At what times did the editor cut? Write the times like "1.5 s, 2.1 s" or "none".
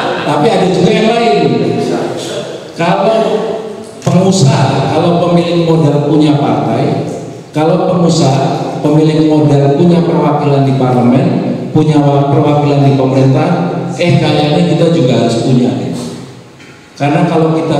none